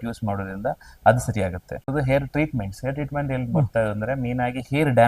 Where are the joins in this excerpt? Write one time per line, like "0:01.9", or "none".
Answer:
0:01.9